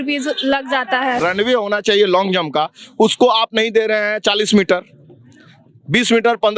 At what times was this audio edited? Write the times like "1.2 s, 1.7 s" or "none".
1.2 s